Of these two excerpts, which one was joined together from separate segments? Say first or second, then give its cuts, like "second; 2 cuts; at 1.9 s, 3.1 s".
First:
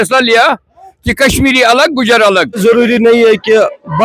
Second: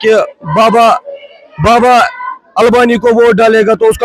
first; 1 cut; at 2.5 s